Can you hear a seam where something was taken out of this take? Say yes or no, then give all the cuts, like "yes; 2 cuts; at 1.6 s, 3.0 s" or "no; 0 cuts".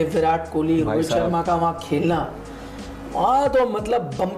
no; 0 cuts